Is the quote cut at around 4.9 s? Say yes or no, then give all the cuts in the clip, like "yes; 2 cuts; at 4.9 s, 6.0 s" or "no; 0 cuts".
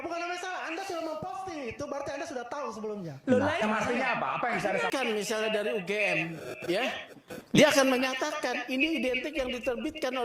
yes; 1 cut; at 4.9 s